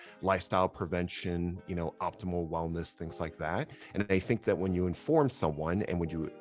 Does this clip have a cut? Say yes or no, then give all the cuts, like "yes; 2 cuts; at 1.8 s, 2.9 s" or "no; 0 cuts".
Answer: yes; 1 cut; at 3.8 s